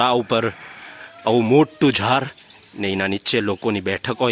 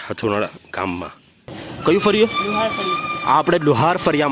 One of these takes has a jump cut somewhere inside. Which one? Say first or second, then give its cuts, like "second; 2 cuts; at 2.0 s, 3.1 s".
second; 1 cut; at 1.7 s